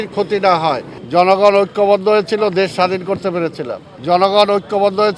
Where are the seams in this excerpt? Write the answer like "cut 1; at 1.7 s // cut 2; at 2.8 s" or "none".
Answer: cut 1; at 0.9 s // cut 2; at 3.9 s